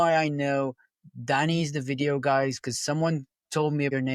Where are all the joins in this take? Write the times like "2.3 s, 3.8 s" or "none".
none